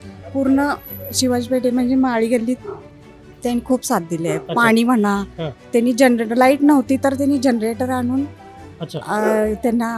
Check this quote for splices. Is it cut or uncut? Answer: uncut